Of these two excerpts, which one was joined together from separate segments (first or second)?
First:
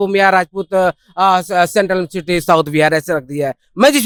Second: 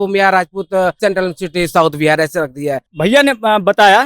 second